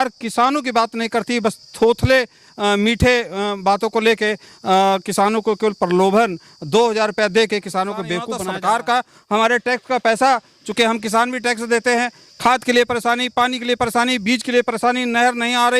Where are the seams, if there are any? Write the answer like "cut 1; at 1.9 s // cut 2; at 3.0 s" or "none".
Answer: cut 1; at 8.3 s